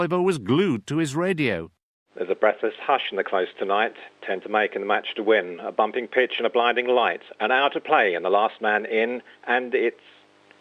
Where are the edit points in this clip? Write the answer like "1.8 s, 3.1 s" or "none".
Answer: none